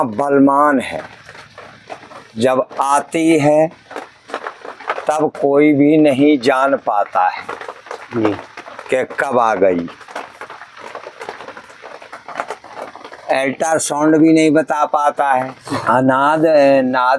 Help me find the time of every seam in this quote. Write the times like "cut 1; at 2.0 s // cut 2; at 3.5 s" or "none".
cut 1; at 15.6 s